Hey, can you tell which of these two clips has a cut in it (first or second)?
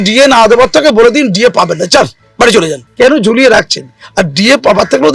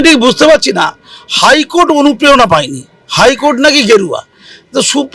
first